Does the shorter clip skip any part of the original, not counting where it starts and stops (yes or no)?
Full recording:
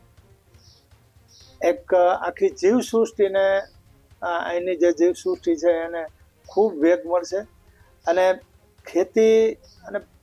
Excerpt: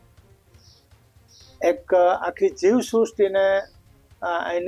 no